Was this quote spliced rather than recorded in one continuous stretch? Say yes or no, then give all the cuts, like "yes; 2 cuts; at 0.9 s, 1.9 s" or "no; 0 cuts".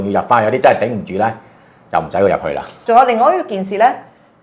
yes; 1 cut; at 2.7 s